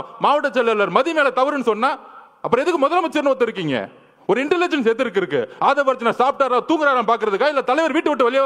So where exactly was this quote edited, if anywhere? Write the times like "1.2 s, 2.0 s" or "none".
none